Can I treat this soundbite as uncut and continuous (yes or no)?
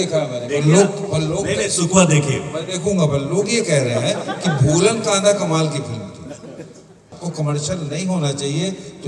no